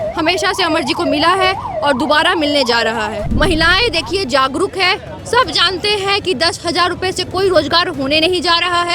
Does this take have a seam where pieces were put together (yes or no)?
yes